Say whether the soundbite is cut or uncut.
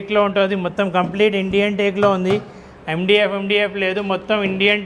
uncut